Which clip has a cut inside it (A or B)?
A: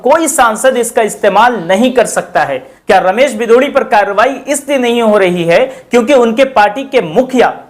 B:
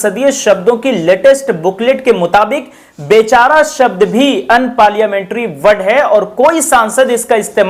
A